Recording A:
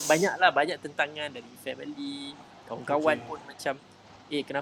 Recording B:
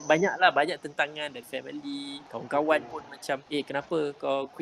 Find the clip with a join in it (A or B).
B